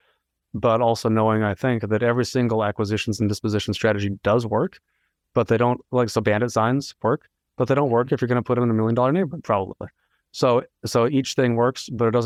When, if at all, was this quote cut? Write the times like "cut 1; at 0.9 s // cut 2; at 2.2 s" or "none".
none